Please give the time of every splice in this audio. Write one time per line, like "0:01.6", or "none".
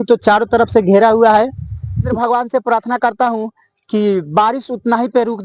0:01.9